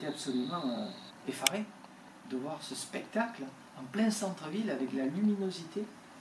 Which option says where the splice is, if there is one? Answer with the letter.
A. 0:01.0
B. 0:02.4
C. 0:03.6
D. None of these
D